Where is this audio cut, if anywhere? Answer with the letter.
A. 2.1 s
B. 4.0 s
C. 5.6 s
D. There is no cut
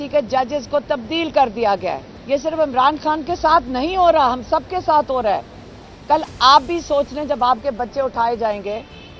A